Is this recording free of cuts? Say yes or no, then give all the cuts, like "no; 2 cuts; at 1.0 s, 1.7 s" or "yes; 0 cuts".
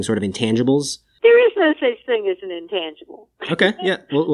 no; 1 cut; at 1.0 s